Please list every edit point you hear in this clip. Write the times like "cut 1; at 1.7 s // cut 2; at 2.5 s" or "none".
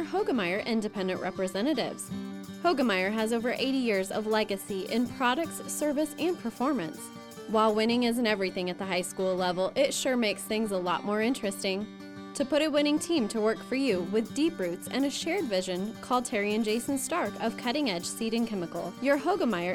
none

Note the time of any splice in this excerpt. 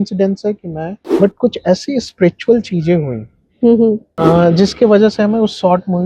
cut 1; at 0.9 s // cut 2; at 4.1 s

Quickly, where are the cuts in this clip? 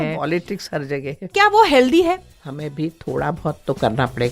cut 1; at 1.3 s // cut 2; at 2.3 s

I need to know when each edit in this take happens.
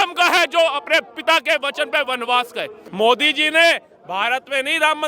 cut 1; at 2.8 s

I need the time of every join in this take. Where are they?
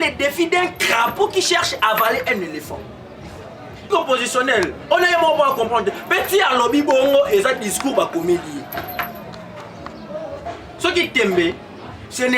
cut 1; at 3.9 s

